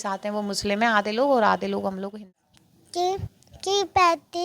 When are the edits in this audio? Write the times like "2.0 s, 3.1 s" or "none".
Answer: 2.1 s